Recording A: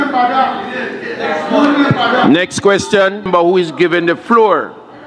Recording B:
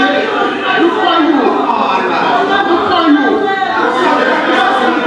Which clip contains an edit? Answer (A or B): A